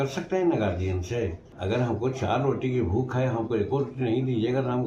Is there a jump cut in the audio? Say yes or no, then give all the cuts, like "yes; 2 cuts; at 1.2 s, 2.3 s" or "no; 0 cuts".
yes; 1 cut; at 1.5 s